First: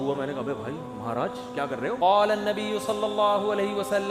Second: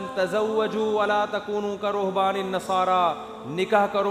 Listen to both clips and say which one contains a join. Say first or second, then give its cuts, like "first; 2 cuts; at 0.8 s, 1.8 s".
first; 1 cut; at 2.0 s